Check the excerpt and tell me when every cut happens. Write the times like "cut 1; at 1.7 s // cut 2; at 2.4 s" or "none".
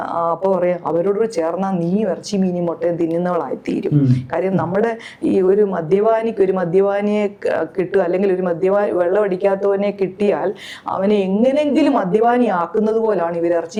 none

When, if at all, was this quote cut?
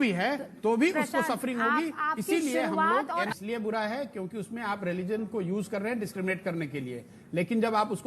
cut 1; at 3.3 s

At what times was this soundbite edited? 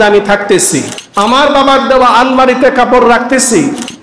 cut 1; at 1.0 s

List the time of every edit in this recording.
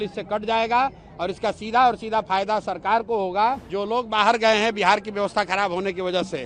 cut 1; at 3.7 s

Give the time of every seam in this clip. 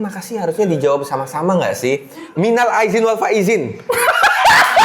cut 1; at 2.2 s

